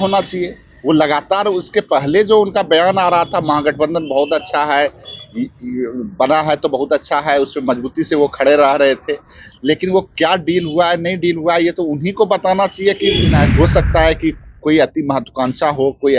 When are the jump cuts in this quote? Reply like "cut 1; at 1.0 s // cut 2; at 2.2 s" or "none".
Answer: cut 1; at 13.3 s